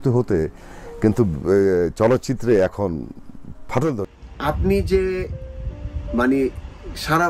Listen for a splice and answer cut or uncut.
cut